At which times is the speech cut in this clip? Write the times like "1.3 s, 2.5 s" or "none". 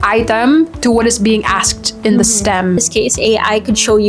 2.8 s